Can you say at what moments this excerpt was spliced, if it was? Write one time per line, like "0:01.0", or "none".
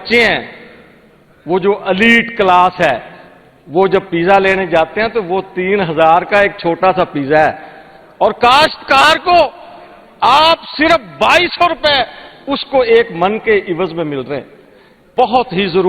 0:15.0